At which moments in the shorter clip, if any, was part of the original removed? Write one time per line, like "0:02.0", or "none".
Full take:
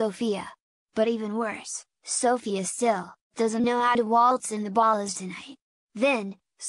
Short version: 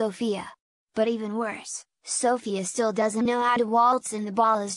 0:02.7